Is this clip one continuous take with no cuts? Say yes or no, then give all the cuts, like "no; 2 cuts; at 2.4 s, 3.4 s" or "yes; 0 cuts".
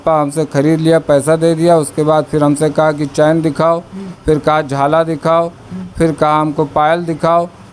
yes; 0 cuts